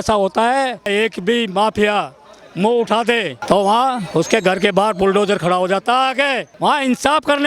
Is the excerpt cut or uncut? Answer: cut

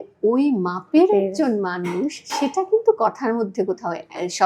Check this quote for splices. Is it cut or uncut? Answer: uncut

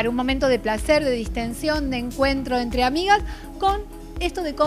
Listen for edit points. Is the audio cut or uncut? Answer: uncut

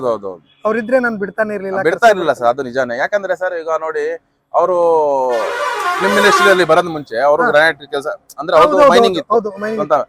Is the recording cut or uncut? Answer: uncut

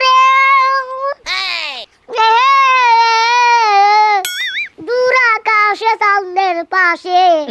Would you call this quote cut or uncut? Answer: uncut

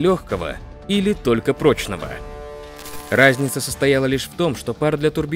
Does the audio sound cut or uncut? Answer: cut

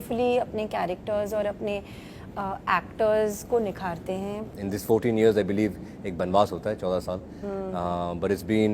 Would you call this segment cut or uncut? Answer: cut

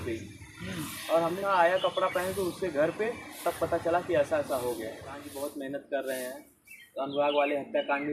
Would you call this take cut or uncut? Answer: cut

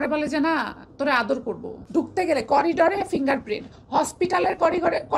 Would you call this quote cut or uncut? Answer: cut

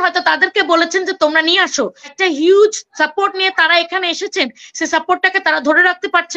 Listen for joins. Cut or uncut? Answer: cut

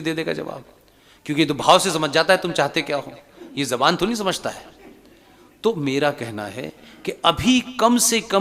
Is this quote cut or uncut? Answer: uncut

